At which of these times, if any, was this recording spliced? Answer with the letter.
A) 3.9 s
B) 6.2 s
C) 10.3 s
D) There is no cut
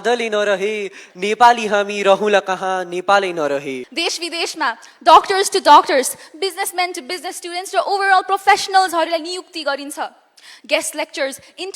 A